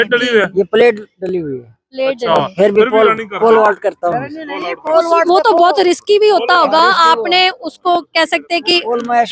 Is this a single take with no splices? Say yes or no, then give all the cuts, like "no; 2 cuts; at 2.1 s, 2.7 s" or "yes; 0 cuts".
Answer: yes; 0 cuts